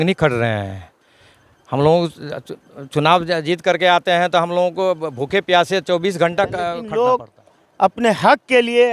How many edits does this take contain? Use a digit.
1